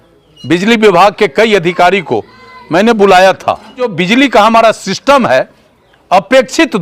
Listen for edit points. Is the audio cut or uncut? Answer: cut